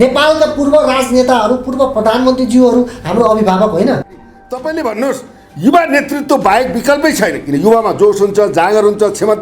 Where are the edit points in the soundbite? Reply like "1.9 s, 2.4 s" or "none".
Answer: 4.2 s